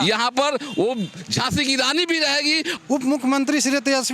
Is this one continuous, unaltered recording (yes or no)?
no